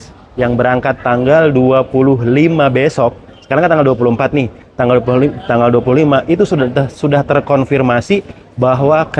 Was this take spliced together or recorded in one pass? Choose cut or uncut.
uncut